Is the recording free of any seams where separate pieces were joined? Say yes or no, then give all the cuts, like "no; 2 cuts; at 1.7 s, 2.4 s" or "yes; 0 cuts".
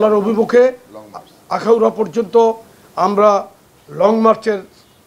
yes; 0 cuts